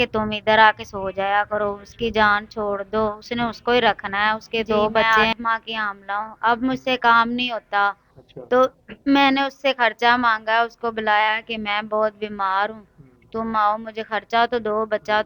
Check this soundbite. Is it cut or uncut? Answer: cut